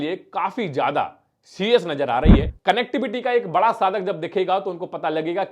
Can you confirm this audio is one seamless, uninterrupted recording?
no; 1 cut; at 2.5 s

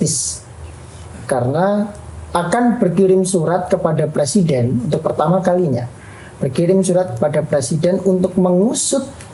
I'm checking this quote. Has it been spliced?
no; 0 cuts

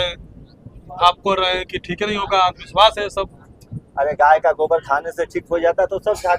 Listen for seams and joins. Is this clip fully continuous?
yes; 0 cuts

